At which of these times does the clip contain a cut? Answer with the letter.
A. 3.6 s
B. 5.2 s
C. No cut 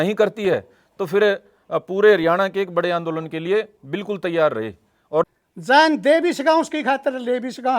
B